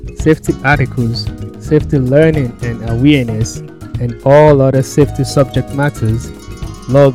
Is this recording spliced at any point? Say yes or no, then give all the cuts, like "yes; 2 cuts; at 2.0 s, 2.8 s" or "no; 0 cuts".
no; 0 cuts